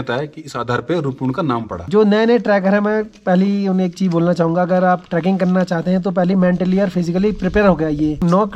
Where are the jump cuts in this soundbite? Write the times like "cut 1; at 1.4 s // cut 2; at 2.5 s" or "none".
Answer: cut 1; at 1.8 s